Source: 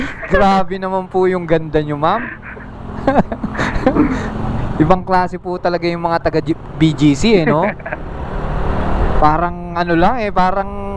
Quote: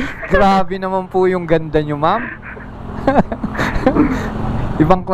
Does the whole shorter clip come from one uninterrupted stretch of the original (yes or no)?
yes